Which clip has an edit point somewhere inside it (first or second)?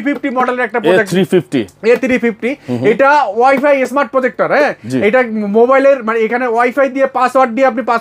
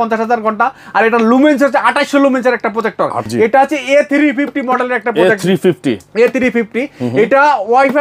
second